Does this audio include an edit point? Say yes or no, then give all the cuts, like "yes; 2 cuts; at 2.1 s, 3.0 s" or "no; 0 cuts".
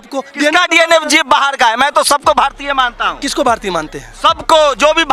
no; 0 cuts